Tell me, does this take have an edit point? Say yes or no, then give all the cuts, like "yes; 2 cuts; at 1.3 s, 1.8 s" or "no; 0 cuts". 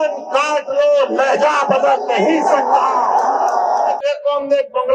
yes; 1 cut; at 4.0 s